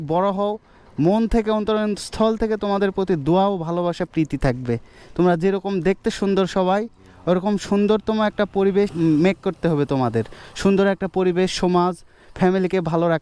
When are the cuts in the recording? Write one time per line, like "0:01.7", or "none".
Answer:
0:09.0